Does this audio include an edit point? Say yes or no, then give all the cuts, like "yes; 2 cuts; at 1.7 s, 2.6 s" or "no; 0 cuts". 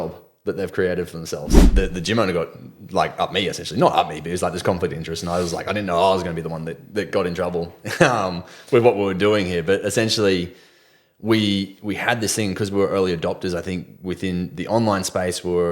yes; 1 cut; at 1.6 s